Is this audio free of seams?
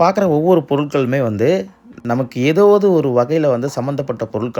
yes; 0 cuts

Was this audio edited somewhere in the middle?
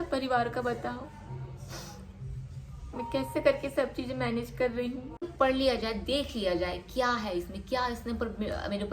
yes; 1 cut; at 5.2 s

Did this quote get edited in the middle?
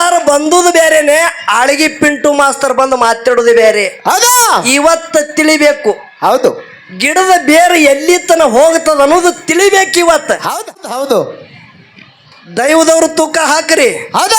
yes; 1 cut; at 10.6 s

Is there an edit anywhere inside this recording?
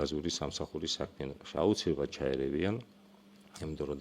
no; 0 cuts

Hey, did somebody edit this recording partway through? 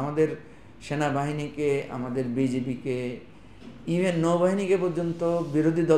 no; 0 cuts

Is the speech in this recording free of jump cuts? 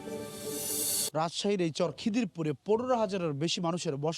no; 1 cut; at 0.9 s

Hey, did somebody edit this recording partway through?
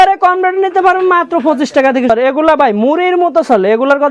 yes; 1 cut; at 2.1 s

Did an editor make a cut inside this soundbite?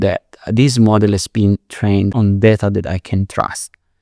yes; 1 cut; at 2.1 s

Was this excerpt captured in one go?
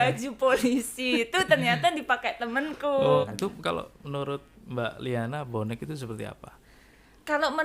no; 1 cut; at 3.2 s

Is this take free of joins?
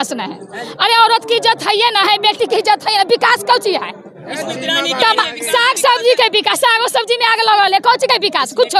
yes; 0 cuts

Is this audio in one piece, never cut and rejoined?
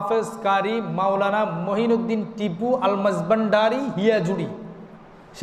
yes; 0 cuts

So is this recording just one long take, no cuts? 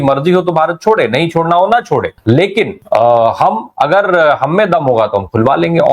yes; 0 cuts

